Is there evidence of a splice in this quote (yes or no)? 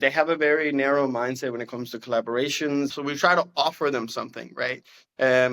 yes